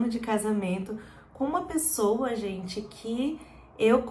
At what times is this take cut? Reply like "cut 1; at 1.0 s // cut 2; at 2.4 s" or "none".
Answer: none